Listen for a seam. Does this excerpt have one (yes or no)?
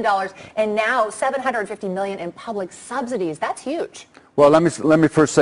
yes